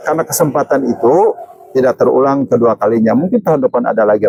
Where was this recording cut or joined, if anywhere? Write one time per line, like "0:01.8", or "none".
none